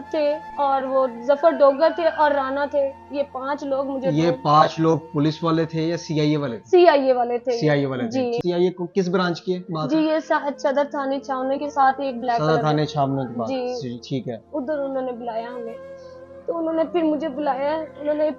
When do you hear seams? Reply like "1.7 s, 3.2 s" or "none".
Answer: none